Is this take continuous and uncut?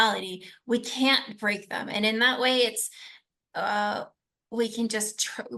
yes; 0 cuts

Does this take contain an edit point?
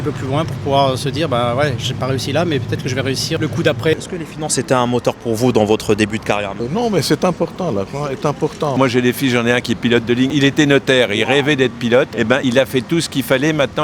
yes; 3 cuts; at 3.9 s, 6.5 s, 8.8 s

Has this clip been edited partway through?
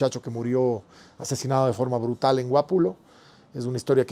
no; 0 cuts

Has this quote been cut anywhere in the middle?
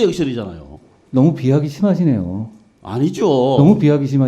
no; 0 cuts

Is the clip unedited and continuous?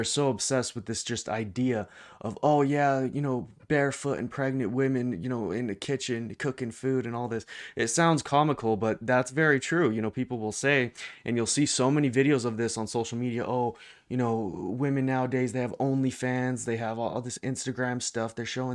yes; 0 cuts

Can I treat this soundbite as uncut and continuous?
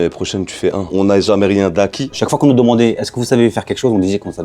no; 2 cuts; at 0.9 s, 2.2 s

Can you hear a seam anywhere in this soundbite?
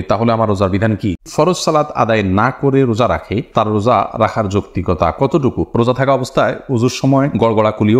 yes; 2 cuts; at 1.2 s, 5.6 s

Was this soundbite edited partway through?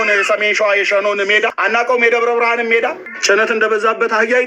yes; 2 cuts; at 1.6 s, 3.1 s

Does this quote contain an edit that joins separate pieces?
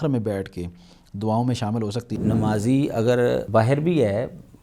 yes; 2 cuts; at 2.2 s, 3.5 s

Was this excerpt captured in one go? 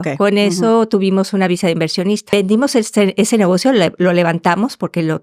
no; 1 cut; at 2.2 s

